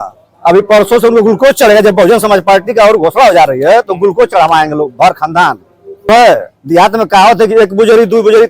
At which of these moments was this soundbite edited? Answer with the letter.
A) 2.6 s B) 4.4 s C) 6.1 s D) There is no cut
C